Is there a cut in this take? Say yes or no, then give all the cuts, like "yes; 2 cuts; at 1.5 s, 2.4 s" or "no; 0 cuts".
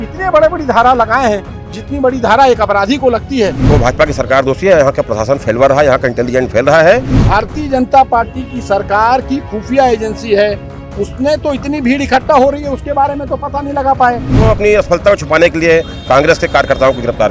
yes; 3 cuts; at 3.6 s, 7.1 s, 14.3 s